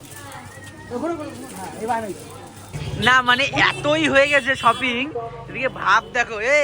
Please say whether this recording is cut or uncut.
cut